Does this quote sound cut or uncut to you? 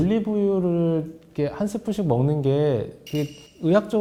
uncut